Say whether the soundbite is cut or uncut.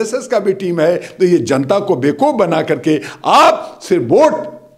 uncut